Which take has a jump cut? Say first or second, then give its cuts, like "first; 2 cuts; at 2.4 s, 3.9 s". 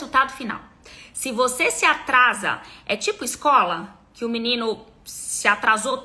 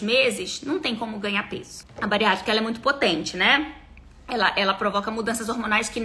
second; 1 cut; at 1.8 s